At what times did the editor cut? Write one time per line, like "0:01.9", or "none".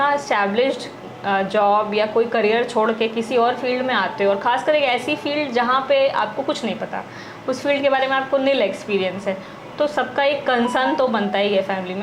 none